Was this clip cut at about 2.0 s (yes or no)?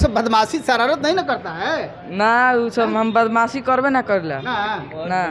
no